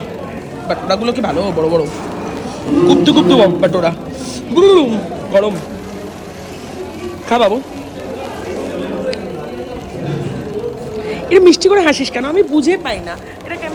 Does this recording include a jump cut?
no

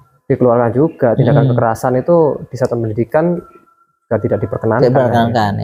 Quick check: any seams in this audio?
no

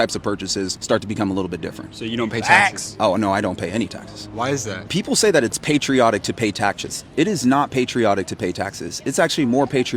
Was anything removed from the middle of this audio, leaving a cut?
no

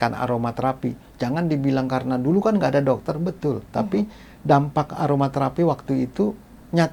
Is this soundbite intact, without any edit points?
yes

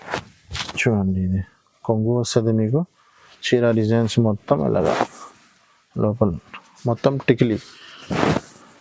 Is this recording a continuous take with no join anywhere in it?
yes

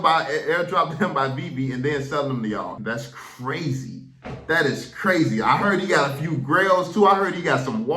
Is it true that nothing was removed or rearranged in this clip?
no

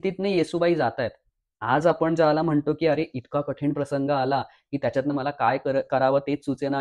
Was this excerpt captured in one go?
yes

